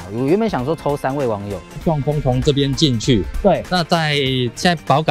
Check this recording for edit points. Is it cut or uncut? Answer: cut